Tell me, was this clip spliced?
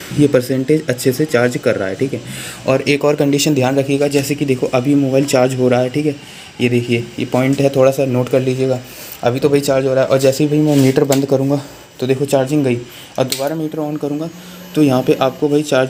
no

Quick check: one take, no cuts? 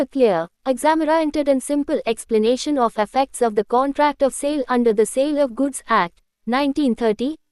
yes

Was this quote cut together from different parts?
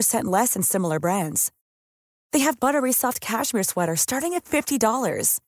no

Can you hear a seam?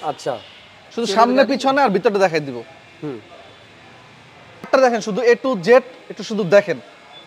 yes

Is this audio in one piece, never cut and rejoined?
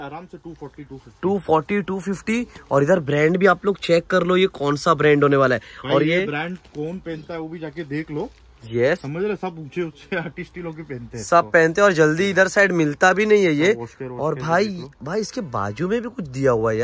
yes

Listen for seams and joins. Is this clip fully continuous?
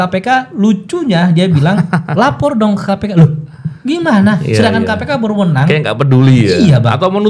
yes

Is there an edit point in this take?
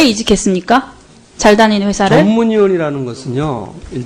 yes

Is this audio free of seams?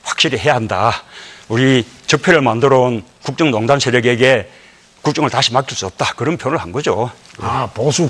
no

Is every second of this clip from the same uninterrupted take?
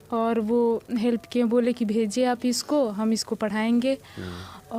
yes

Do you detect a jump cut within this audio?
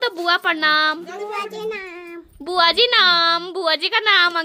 no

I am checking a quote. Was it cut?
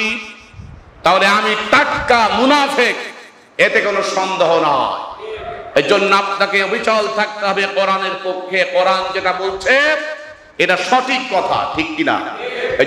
no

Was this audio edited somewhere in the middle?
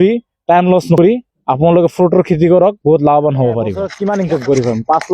yes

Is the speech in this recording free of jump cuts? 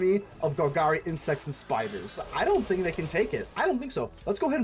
no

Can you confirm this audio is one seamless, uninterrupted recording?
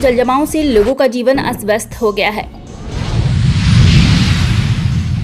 no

